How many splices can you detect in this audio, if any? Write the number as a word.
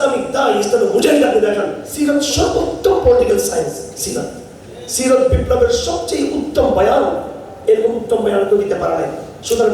one